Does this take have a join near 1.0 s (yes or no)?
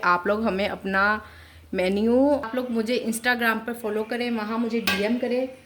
no